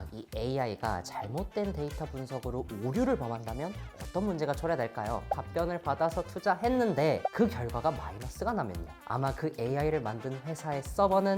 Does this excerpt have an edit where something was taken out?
yes; 2 cuts; at 5.3 s, 8.8 s

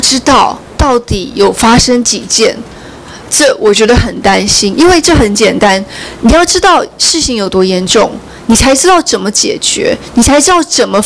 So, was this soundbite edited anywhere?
no; 0 cuts

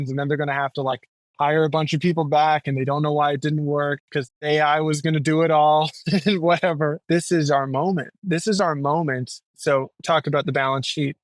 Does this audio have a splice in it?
yes; 3 cuts; at 4.3 s, 7.0 s, 9.5 s

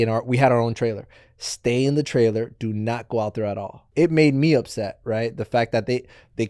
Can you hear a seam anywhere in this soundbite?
yes; 1 cut; at 3.9 s

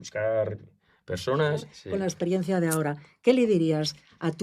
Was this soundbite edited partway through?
yes; 1 cut; at 1.8 s

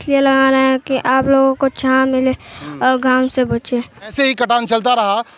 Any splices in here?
yes; 1 cut; at 4.1 s

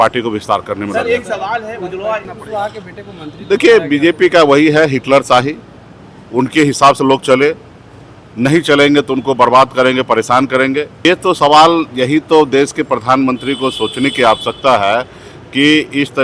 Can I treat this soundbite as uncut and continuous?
no; 2 cuts; at 2.3 s, 11.0 s

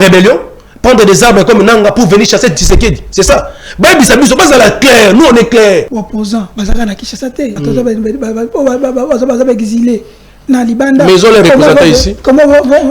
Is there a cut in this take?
yes; 2 cuts; at 5.9 s, 7.6 s

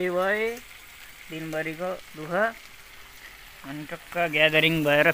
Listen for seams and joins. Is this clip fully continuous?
yes; 0 cuts

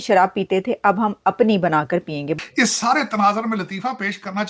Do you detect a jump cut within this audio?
yes; 1 cut; at 2.3 s

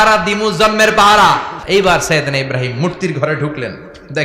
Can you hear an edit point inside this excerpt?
yes; 1 cut; at 1.6 s

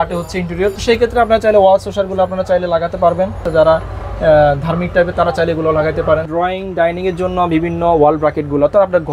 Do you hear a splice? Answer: yes; 3 cuts; at 0.7 s, 3.4 s, 6.2 s

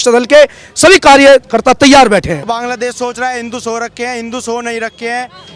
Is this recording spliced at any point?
yes; 1 cut; at 2.4 s

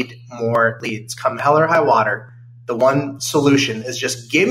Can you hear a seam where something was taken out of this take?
no; 0 cuts

